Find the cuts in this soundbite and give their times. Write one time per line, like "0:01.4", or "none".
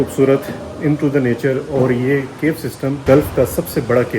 0:03.0